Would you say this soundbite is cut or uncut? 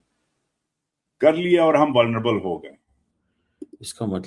cut